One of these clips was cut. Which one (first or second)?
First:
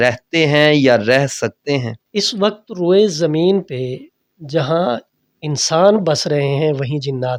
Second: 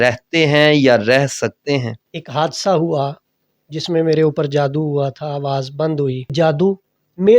second